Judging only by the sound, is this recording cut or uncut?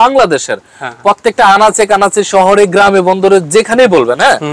uncut